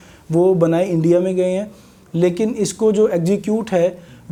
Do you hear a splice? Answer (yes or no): no